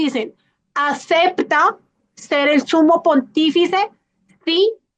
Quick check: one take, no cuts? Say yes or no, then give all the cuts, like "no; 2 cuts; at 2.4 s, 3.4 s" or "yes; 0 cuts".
yes; 0 cuts